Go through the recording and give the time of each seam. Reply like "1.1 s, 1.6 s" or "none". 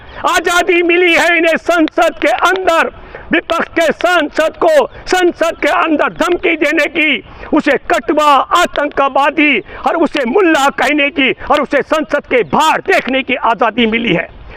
none

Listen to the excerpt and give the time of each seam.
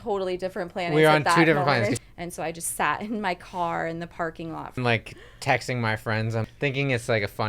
1.9 s, 4.8 s, 6.5 s

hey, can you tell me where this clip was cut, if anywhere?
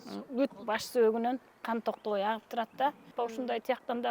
3.1 s

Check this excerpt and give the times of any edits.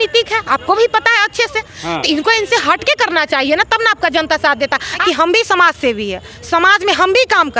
5.0 s

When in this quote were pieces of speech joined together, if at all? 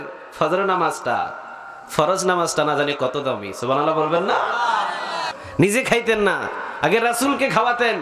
5.7 s

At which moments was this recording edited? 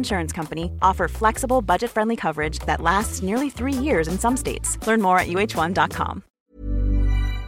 6.2 s

